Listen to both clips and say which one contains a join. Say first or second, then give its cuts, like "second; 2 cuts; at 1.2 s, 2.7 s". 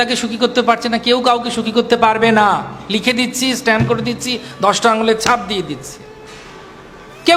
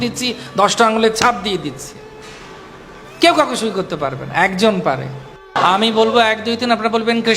second; 1 cut; at 5.6 s